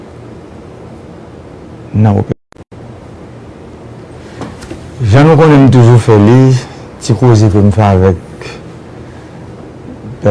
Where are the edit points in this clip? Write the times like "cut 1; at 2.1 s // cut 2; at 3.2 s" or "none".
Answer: cut 1; at 2.3 s